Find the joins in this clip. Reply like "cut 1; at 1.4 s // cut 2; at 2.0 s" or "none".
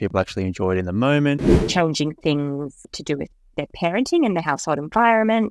cut 1; at 1.6 s // cut 2; at 2.8 s